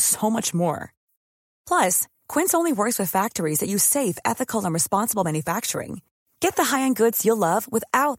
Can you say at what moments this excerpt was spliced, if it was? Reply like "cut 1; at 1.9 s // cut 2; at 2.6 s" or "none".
none